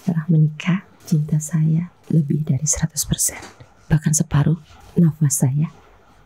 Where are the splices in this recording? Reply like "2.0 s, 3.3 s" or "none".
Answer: 0.9 s, 2.0 s, 4.8 s